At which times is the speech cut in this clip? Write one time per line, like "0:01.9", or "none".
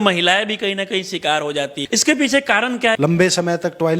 0:01.8
0:03.0